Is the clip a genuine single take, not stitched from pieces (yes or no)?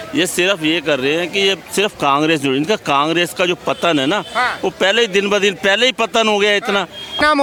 yes